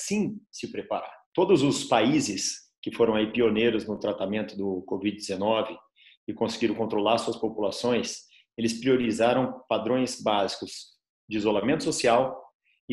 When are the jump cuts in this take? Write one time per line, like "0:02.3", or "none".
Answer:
0:01.2